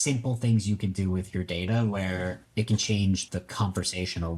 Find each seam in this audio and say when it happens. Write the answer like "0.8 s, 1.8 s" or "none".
2.4 s, 3.2 s